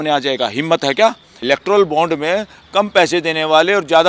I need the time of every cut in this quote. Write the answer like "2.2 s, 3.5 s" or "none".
1.3 s